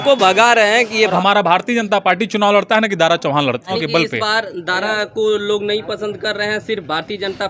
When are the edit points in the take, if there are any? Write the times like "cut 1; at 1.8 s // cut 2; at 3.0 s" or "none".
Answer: cut 1; at 1.1 s // cut 2; at 3.8 s